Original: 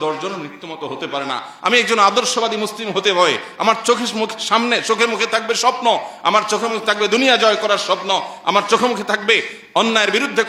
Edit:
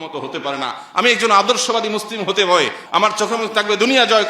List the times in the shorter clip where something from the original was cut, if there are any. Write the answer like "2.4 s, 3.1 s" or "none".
2.8 s